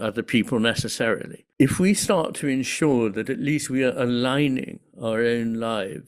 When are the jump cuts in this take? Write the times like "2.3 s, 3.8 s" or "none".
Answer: 1.4 s